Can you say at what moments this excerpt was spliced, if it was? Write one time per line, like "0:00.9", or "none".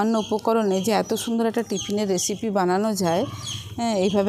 none